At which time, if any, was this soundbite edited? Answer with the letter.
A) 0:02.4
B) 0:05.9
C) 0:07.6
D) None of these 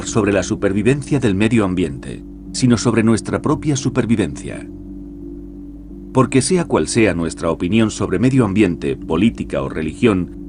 B